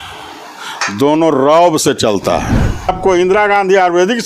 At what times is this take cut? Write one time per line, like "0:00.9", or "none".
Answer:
0:02.9